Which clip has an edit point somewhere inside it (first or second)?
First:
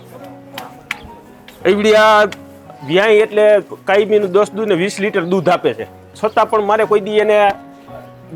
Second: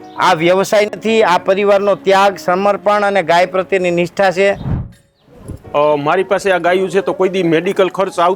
second